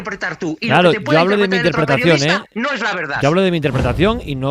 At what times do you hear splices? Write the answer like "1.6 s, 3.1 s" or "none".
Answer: none